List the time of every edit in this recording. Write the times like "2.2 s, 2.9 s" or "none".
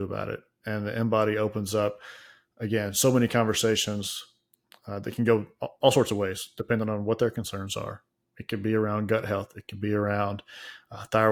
none